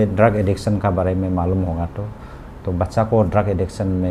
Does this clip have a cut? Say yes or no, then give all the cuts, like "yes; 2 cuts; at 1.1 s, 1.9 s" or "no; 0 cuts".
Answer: no; 0 cuts